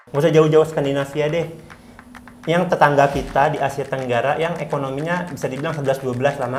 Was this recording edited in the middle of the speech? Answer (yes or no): no